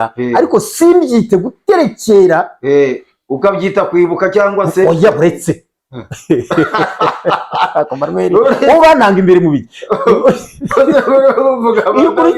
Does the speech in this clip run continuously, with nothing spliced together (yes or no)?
yes